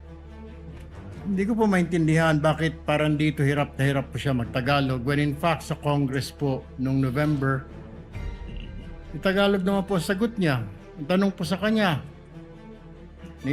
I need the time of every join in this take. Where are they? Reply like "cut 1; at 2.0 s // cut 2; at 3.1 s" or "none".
cut 1; at 1.0 s